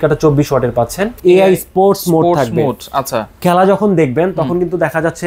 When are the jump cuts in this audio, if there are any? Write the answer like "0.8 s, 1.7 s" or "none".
1.2 s